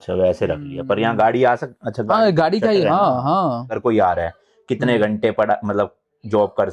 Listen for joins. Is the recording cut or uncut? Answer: cut